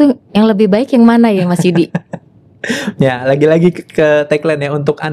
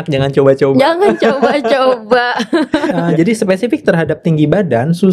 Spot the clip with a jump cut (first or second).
second